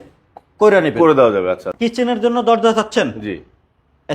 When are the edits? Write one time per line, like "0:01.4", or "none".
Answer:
0:01.7